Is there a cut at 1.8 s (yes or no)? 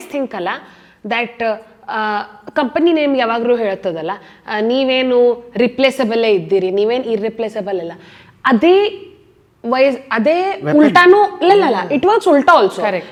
no